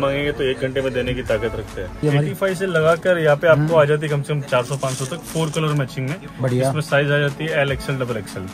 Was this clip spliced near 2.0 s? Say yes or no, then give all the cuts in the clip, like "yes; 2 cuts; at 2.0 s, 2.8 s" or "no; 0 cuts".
yes; 1 cut; at 2.0 s